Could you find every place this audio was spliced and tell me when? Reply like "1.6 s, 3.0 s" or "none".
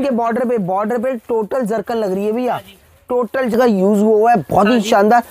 3.5 s